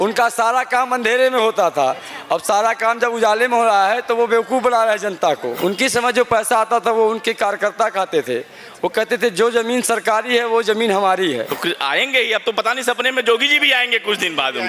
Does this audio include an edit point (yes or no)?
yes